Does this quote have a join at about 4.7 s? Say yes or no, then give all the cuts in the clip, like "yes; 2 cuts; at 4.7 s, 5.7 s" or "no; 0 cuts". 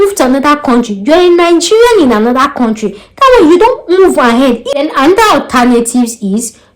yes; 1 cut; at 4.7 s